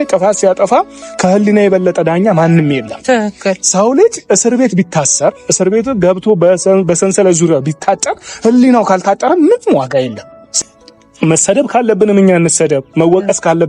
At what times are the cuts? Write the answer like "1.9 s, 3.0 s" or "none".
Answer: 10.5 s